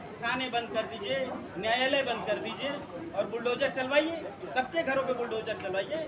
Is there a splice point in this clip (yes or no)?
no